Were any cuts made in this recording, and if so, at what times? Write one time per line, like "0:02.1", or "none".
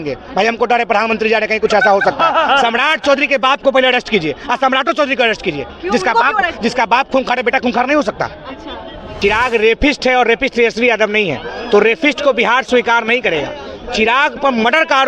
0:09.1

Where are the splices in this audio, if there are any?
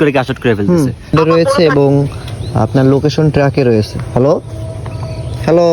0:01.1

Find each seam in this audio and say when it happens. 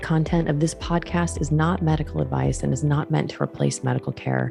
none

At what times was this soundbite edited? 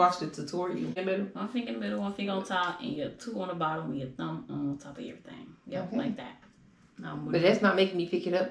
0:01.0

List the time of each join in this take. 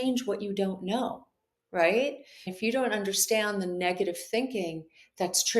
0:02.4

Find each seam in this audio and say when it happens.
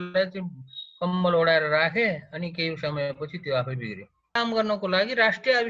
0:04.4

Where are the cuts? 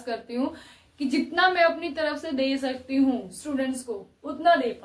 none

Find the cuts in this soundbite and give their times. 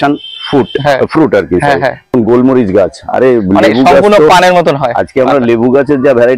0:02.1

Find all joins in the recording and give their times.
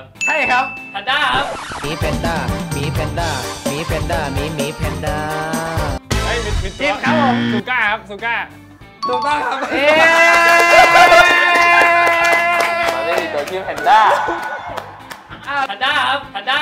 none

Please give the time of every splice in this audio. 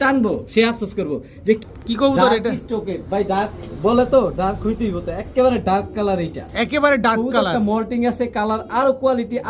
0:01.6

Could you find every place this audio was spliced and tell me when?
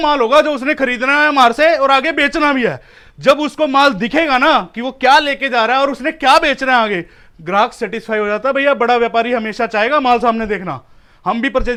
none

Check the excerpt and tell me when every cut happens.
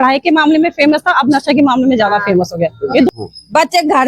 0:03.1

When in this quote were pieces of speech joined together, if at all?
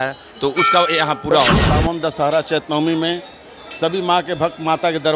0:01.6

